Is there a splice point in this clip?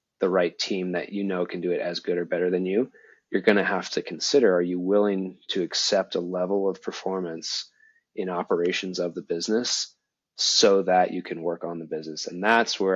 no; 0 cuts

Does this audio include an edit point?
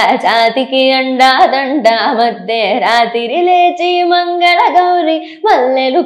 no; 0 cuts

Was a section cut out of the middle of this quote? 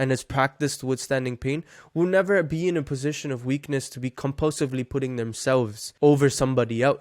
yes; 1 cut; at 5.8 s

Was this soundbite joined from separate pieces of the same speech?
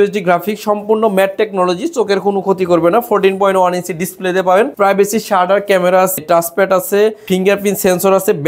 yes; 3 cuts; at 4.7 s, 6.2 s, 7.2 s

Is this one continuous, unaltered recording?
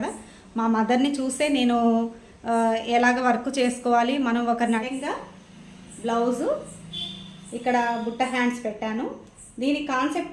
no; 1 cut; at 4.8 s

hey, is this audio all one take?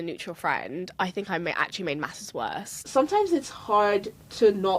no; 1 cut; at 2.8 s

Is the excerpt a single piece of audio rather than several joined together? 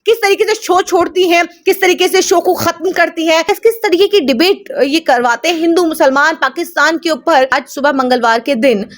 no; 2 cuts; at 3.4 s, 7.5 s

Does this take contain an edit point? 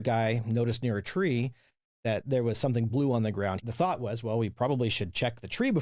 yes; 1 cut; at 3.6 s

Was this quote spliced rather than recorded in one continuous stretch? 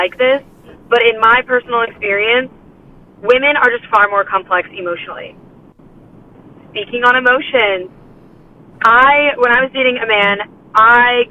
no; 0 cuts

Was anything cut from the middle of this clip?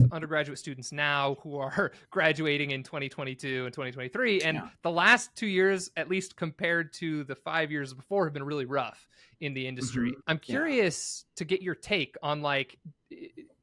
yes; 1 cut; at 10.2 s

